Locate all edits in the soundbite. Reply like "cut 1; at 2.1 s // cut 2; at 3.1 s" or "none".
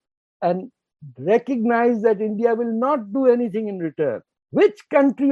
cut 1; at 4.3 s